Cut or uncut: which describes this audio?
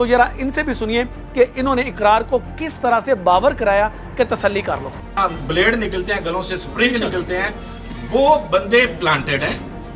uncut